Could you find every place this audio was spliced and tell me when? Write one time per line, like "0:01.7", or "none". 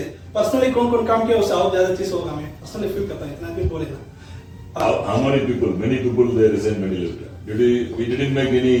none